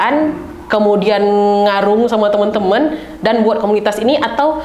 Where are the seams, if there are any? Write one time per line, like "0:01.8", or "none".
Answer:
none